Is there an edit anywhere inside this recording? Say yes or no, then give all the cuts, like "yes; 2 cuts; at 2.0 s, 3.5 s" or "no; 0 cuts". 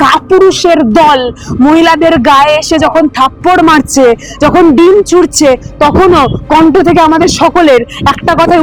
no; 0 cuts